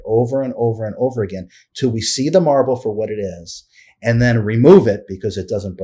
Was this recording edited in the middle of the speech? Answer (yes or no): no